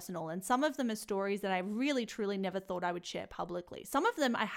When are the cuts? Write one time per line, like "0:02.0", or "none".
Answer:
none

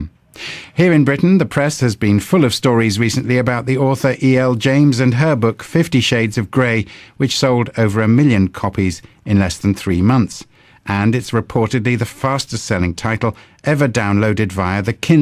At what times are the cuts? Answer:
0:12.3

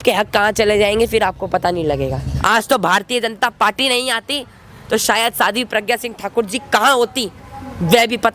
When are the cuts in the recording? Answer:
0:02.3

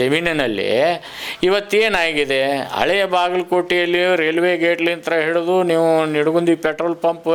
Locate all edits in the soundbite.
none

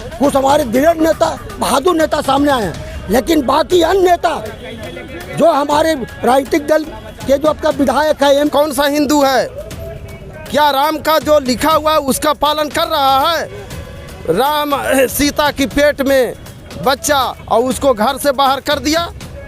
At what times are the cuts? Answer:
0:08.5

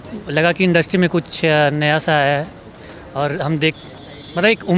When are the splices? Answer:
none

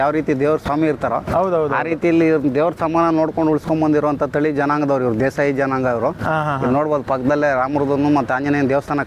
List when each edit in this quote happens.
none

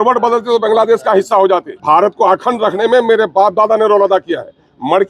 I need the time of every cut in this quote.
0:01.7

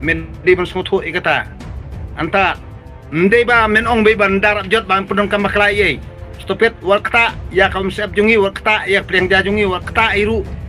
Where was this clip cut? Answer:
none

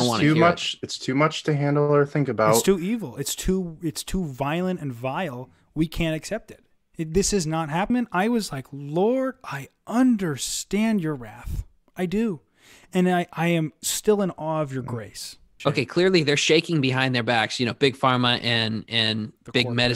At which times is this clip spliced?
0:07.9
0:15.5

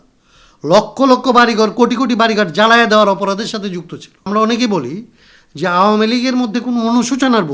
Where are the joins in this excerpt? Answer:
0:04.3

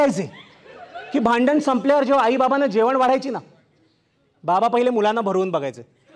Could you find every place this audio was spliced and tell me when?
none

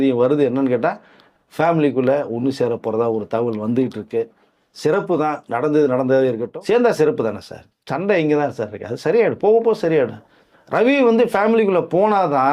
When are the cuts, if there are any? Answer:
0:06.4

